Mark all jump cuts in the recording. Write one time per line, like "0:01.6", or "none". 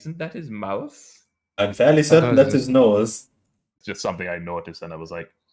0:03.8

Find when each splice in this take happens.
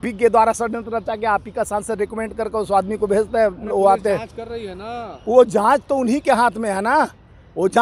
none

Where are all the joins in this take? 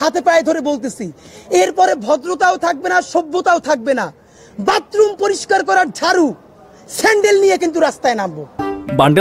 none

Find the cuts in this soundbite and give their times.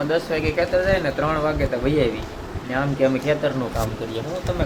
none

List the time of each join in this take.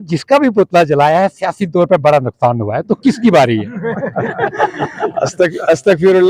none

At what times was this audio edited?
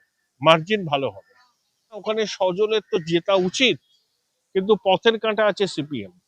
0:02.0

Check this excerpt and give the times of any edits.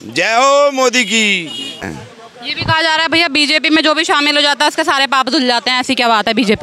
0:01.9

